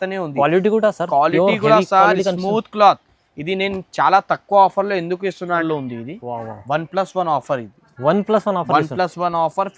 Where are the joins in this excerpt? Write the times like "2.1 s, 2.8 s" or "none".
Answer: 5.6 s